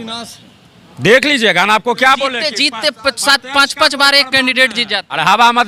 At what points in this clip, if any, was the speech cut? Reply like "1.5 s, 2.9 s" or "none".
none